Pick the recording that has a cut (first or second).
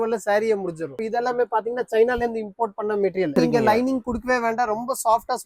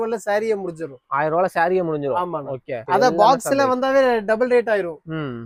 first